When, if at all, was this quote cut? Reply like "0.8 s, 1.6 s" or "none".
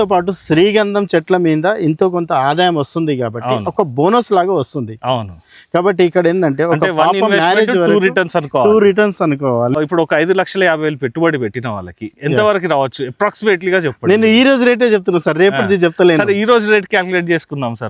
9.8 s